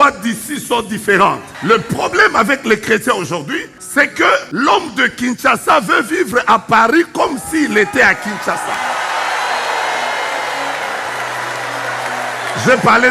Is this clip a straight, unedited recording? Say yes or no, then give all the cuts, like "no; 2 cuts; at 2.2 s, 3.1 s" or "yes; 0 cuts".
no; 2 cuts; at 1.5 s, 4.1 s